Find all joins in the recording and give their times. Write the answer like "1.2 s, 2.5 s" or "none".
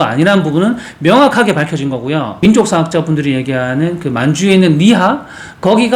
2.4 s